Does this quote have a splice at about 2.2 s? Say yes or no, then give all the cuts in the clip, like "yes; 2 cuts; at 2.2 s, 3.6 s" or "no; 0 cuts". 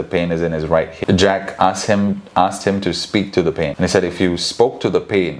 no; 2 cuts; at 0.9 s, 3.7 s